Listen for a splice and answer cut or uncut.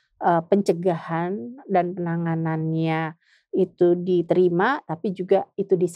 uncut